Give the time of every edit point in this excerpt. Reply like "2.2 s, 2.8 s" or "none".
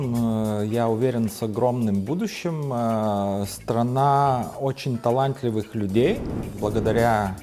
6.5 s